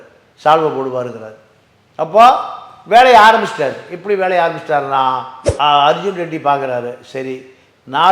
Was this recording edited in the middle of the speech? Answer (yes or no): yes